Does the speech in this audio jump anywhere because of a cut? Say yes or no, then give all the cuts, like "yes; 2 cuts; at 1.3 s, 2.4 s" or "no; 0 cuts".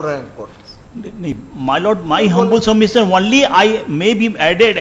no; 0 cuts